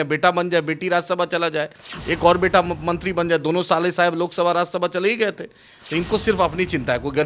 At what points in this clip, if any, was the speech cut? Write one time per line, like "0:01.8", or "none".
none